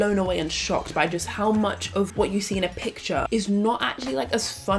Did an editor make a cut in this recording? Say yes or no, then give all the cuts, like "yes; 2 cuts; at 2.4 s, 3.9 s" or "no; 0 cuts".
yes; 2 cuts; at 2.1 s, 3.3 s